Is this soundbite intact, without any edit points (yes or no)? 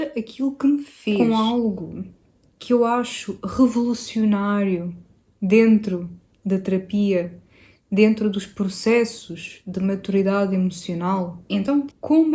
no